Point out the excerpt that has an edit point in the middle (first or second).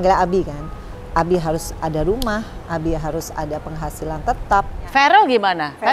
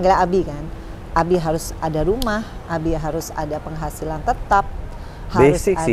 first